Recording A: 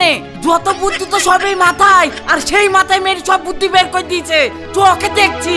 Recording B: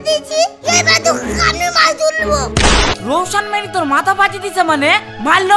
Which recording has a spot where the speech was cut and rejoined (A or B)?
B